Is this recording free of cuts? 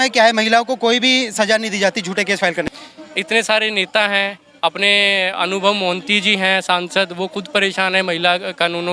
no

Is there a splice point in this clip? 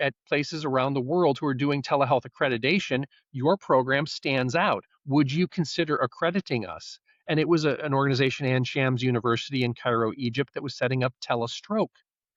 no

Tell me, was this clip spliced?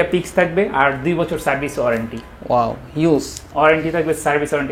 no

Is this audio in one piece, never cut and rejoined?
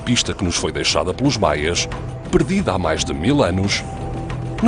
yes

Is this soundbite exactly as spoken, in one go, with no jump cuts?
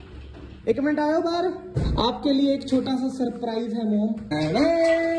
no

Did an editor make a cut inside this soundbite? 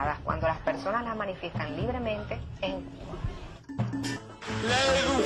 yes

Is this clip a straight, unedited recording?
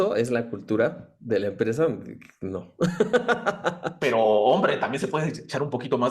no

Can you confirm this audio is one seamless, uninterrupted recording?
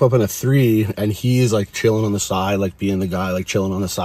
yes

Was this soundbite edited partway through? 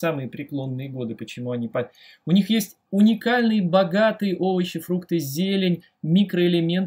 no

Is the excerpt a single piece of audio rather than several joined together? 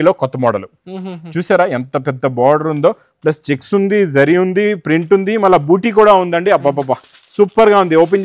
yes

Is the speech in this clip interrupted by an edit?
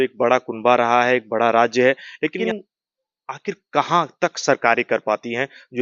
yes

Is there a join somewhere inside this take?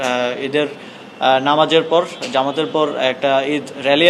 no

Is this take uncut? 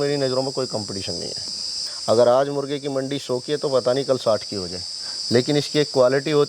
no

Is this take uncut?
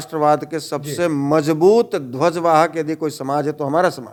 yes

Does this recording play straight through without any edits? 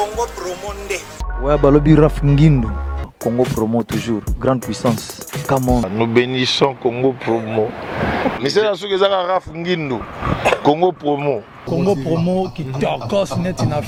yes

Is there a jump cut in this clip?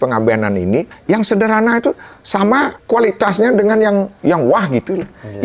yes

